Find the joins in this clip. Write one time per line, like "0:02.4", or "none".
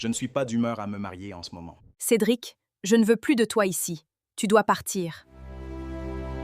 0:01.9